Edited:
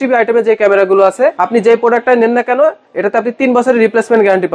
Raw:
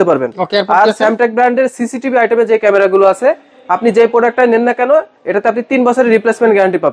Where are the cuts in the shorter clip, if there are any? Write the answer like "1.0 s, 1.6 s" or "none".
1.4 s